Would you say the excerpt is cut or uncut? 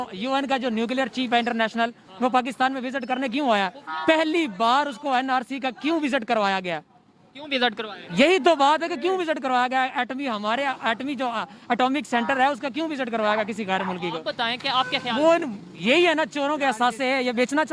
uncut